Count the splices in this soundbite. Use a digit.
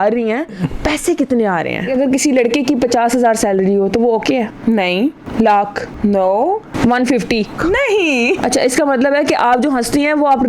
2